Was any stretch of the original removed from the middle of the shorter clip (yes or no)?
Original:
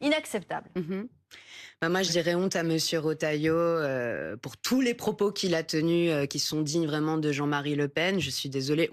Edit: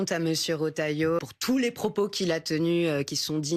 yes